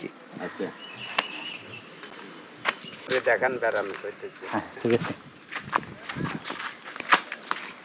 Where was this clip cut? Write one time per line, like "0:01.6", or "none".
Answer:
none